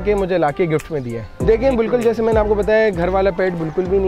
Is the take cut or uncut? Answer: cut